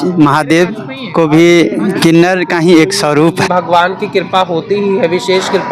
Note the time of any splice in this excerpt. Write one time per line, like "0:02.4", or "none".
0:03.5